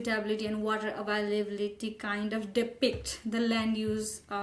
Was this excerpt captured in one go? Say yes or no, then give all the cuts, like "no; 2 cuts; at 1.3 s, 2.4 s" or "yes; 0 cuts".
yes; 0 cuts